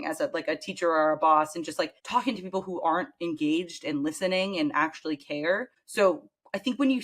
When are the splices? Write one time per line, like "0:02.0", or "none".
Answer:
0:02.0
0:05.8